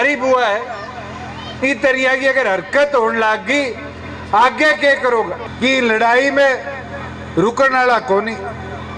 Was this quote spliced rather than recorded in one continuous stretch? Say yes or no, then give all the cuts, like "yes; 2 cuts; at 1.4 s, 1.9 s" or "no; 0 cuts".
yes; 1 cut; at 5.4 s